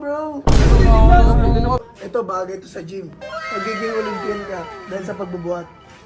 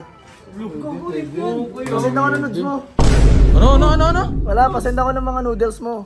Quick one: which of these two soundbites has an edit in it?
first; 1 cut; at 1.8 s

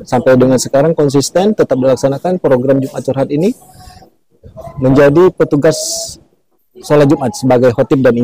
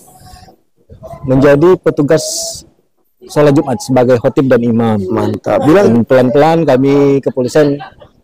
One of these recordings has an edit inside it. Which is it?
second; 1 cut; at 5.9 s

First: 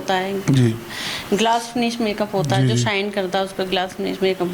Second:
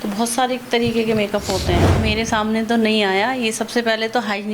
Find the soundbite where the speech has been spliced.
second; 1 cut; at 1.9 s

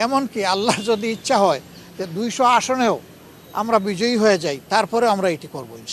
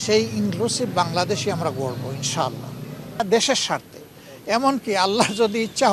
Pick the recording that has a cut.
second; 1 cut; at 3.2 s

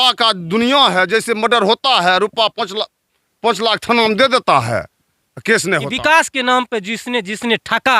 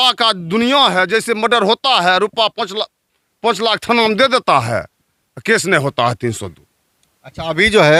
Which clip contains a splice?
first; 1 cut; at 5.9 s

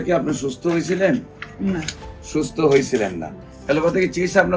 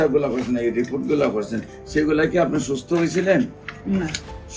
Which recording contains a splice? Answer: first; 1 cut; at 3.5 s

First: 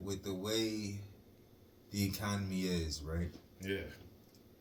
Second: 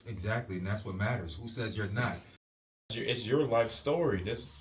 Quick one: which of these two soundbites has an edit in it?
second; 1 cut; at 2.6 s

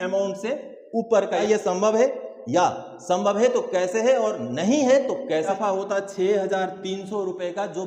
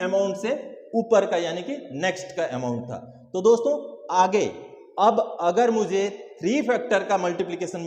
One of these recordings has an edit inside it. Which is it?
first; 2 cuts; at 1.4 s, 5.5 s

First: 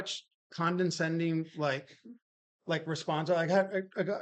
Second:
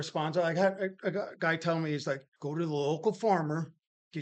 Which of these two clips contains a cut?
second; 1 cut; at 2.3 s

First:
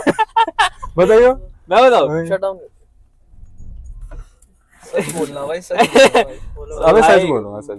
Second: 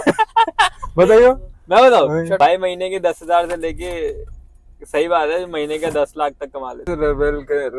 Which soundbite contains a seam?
second; 2 cuts; at 2.4 s, 6.8 s

